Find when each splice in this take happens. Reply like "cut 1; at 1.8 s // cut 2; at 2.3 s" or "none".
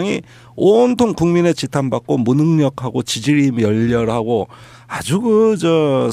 none